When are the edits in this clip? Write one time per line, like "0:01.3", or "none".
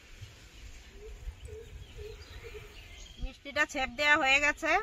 0:03.0